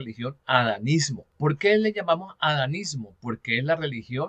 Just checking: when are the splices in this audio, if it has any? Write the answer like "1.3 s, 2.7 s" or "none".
1.2 s